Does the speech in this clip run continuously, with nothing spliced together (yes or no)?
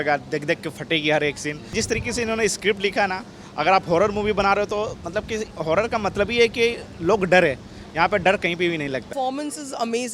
no